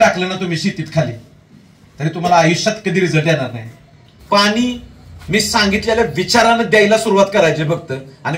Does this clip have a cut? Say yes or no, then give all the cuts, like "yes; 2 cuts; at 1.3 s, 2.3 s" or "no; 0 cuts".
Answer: yes; 1 cut; at 4.2 s